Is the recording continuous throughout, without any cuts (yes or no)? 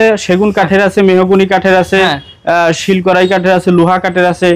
yes